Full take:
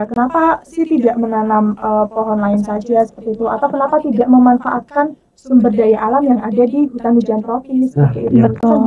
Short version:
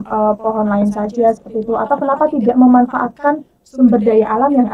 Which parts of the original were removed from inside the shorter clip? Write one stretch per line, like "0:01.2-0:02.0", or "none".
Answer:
none